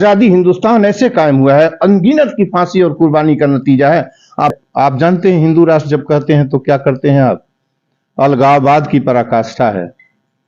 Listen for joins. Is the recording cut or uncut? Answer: cut